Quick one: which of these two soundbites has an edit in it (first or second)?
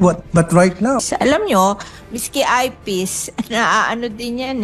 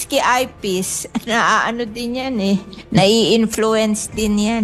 first